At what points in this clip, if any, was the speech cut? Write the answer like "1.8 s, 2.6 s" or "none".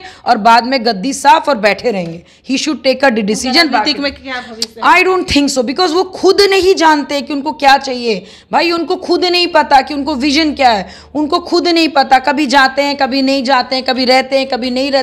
none